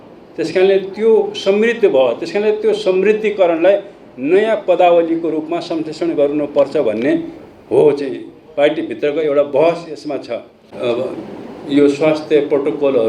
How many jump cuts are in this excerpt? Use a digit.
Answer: 1